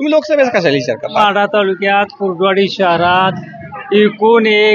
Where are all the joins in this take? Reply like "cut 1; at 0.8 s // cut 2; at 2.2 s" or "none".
cut 1; at 1.2 s